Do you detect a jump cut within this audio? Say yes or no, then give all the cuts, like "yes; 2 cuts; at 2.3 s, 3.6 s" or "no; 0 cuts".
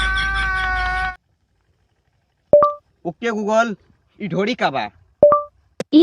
yes; 1 cut; at 1.1 s